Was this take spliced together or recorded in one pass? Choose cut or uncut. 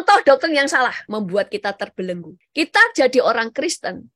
cut